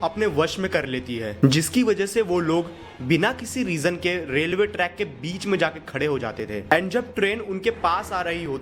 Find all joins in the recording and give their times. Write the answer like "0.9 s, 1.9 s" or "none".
none